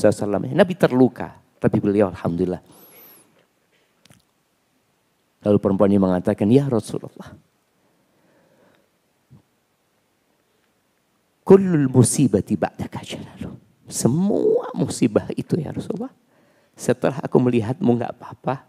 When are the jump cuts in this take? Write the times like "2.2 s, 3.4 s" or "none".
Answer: none